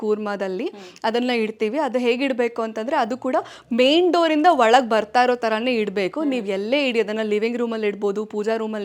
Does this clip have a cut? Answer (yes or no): no